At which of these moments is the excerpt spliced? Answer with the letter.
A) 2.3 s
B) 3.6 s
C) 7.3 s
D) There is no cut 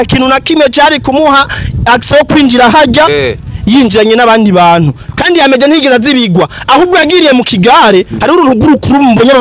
D